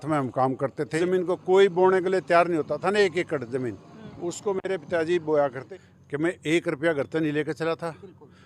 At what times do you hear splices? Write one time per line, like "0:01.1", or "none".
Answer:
0:00.9
0:05.6